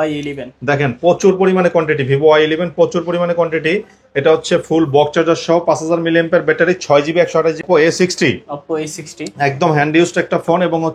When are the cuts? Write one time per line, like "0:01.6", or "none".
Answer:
0:07.6